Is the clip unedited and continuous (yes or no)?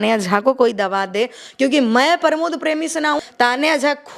no